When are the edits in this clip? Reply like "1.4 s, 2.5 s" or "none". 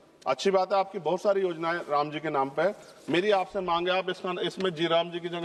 none